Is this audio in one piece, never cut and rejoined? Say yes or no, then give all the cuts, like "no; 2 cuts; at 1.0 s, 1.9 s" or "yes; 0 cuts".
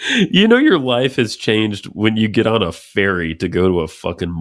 yes; 0 cuts